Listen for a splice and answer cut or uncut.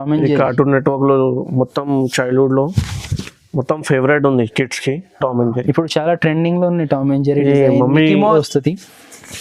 cut